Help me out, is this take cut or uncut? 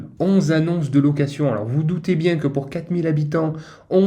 uncut